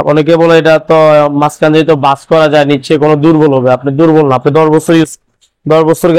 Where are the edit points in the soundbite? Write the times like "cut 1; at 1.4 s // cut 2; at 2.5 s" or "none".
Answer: none